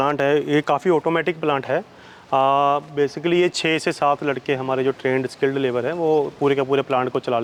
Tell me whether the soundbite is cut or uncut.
uncut